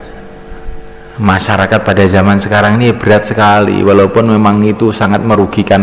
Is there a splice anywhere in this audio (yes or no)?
no